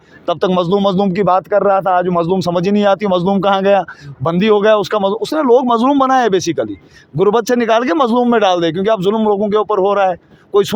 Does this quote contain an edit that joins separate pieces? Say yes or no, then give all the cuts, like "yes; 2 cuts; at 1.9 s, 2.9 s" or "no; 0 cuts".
no; 0 cuts